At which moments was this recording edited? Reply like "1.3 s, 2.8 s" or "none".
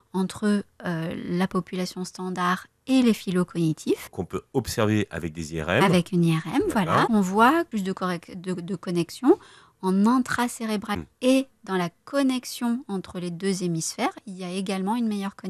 4.0 s, 7.1 s, 7.7 s, 11.0 s